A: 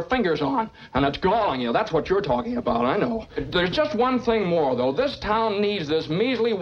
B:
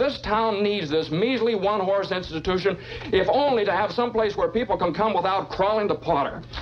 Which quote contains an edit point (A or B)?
A